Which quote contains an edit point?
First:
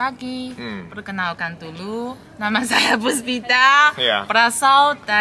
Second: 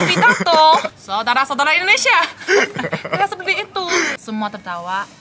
second; 3 cuts; at 0.9 s, 2.3 s, 4.2 s

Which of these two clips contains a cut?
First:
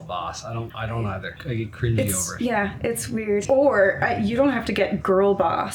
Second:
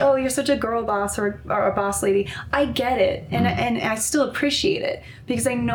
first; 2 cuts; at 1.2 s, 3.4 s

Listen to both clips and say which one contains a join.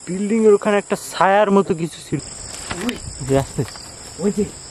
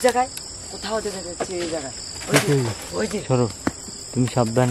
first; 1 cut; at 2.2 s

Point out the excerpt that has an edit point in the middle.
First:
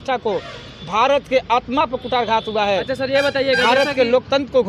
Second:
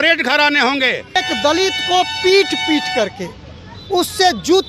second; 1 cut; at 1.2 s

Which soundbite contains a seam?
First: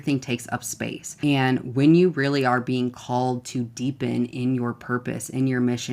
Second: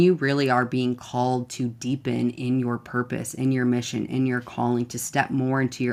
first; 1 cut; at 1.0 s

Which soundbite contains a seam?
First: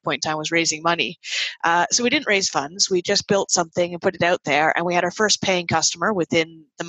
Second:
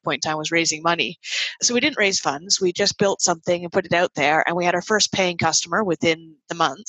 second; 1 cut; at 1.6 s

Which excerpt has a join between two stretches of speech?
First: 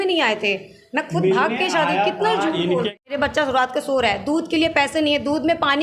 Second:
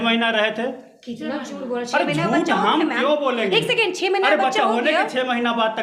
first; 1 cut; at 3.0 s

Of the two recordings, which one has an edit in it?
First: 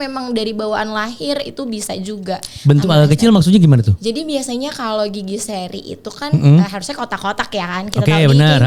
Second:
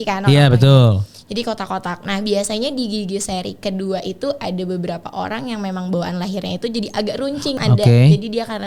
second; 1 cut; at 7.5 s

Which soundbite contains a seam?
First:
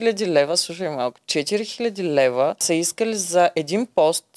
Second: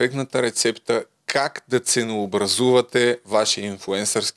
first; 1 cut; at 2.6 s

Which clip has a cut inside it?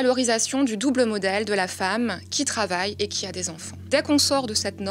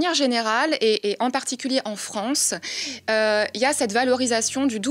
first; 1 cut; at 3.9 s

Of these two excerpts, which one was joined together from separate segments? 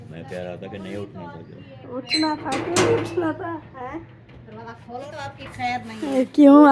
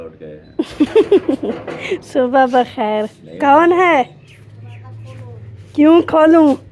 first; 1 cut; at 5.1 s

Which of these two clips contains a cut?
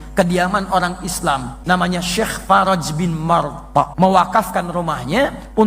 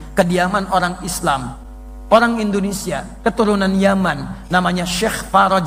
first; 2 cuts; at 1.5 s, 3.9 s

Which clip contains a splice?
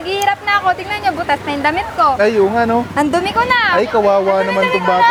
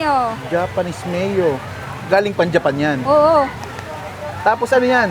second; 1 cut; at 3.6 s

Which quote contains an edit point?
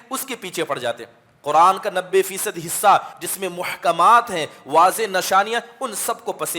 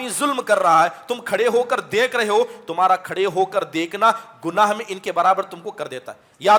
first; 1 cut; at 3.1 s

